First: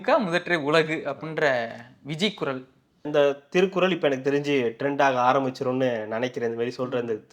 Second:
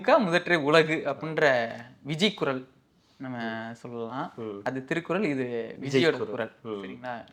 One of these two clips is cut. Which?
first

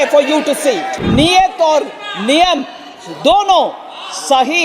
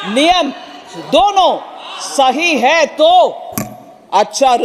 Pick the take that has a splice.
first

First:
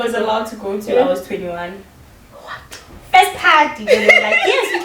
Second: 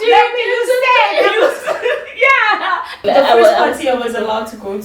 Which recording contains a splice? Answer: second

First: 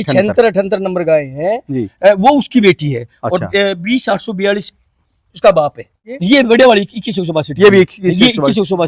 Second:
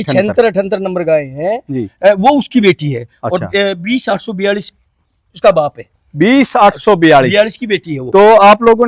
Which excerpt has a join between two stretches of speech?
first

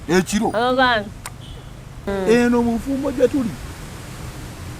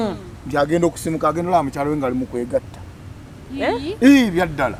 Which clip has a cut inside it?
first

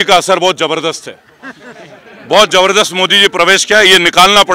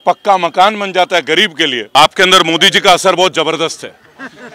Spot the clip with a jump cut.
second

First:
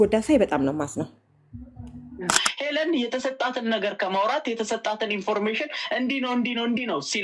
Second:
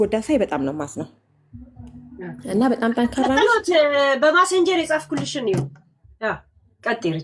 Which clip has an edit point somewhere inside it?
first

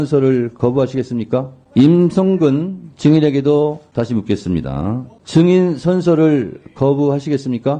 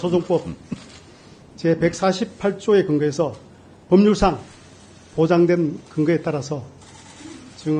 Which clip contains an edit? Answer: first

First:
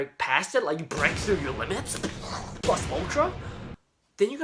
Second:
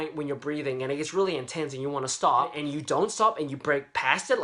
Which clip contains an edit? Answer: second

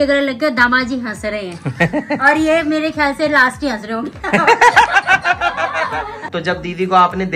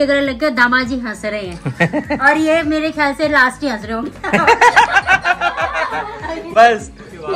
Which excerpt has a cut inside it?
first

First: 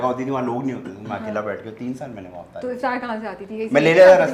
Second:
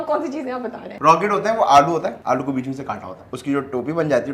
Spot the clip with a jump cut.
second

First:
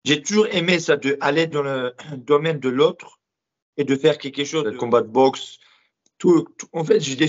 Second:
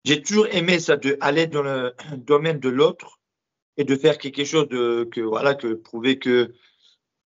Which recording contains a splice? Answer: first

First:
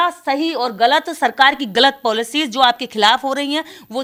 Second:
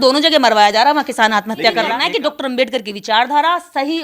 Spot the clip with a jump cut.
second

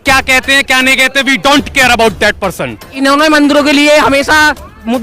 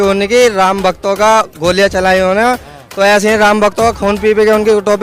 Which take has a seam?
first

